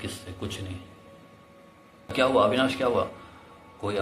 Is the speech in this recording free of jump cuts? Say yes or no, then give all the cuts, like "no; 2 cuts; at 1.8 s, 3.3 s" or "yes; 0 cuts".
no; 1 cut; at 2.1 s